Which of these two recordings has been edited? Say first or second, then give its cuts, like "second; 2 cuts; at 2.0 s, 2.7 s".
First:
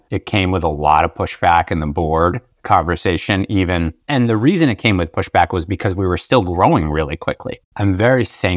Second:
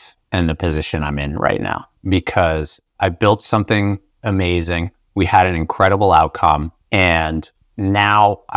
first; 1 cut; at 7.7 s